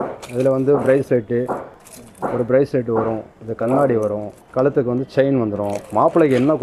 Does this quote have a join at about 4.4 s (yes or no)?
yes